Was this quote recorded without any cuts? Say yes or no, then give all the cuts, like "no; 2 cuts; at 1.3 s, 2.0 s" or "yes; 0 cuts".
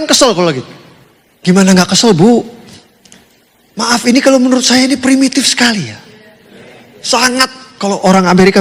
yes; 0 cuts